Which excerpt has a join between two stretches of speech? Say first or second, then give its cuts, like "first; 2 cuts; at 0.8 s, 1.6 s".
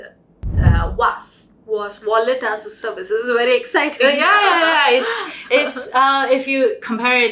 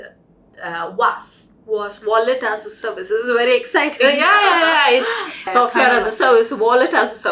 second; 1 cut; at 5.5 s